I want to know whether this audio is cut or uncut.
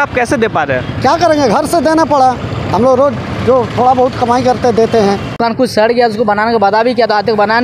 cut